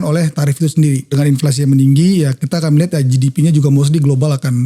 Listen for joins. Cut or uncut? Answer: cut